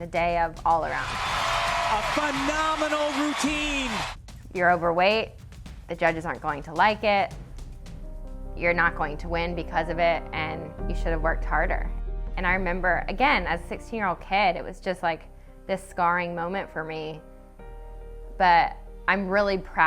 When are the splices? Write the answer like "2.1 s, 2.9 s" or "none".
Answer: 1.1 s, 4.0 s